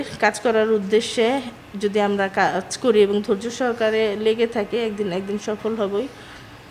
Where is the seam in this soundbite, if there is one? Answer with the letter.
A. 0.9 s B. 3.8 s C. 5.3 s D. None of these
D